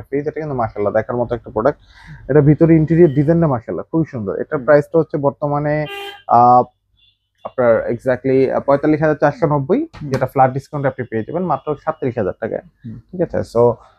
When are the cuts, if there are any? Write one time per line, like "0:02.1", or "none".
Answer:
none

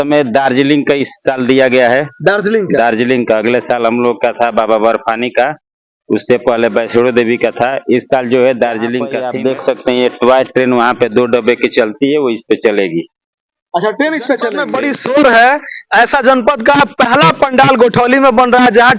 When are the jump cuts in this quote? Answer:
0:09.2
0:14.7

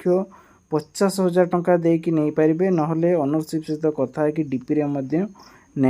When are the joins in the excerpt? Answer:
none

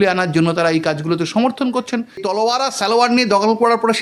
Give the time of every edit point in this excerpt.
0:02.2

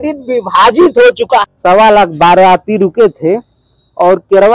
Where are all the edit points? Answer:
0:01.4

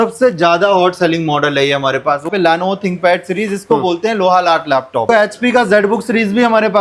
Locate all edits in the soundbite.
0:02.3
0:05.1

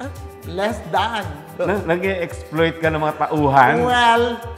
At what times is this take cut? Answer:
0:01.4

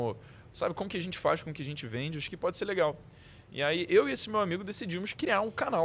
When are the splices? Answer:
none

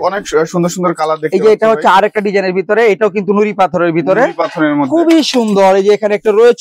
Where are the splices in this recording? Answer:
none

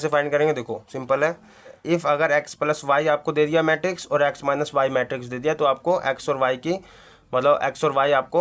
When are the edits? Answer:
0:01.8

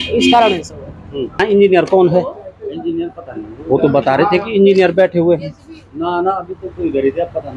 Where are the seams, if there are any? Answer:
0:01.4

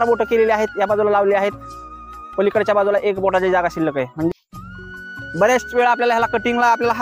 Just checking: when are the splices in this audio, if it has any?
0:04.3

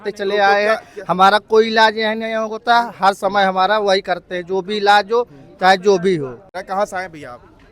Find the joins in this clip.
0:06.6

